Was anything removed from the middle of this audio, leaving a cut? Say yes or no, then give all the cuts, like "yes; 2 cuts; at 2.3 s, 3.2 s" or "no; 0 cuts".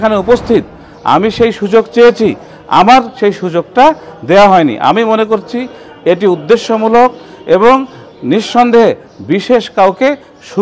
no; 0 cuts